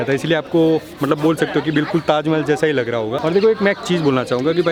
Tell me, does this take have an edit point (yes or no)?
no